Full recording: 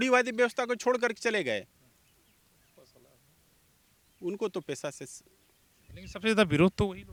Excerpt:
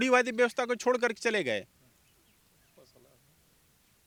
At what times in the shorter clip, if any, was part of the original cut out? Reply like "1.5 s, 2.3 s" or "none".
none